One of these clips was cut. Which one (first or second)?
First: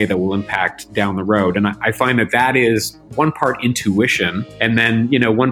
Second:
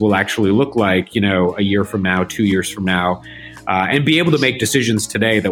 first